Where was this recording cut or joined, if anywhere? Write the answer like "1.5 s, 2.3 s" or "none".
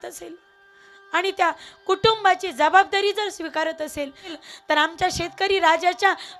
4.4 s